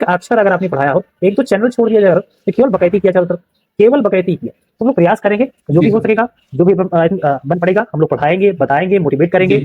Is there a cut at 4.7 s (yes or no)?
yes